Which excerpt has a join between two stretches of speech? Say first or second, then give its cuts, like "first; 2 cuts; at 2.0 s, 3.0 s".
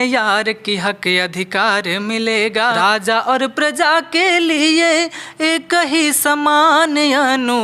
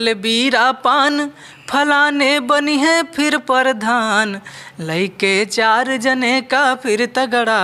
first; 1 cut; at 2.8 s